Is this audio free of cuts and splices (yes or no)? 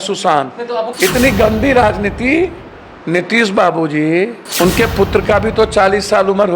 no